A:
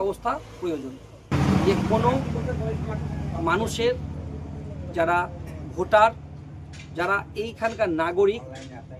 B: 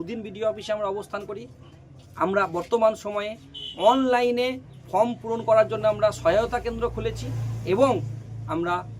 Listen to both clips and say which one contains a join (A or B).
A